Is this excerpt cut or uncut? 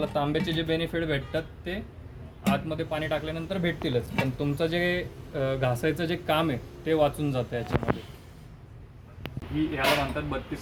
uncut